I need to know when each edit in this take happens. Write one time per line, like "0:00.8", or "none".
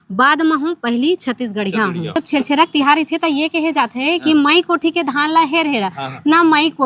0:02.2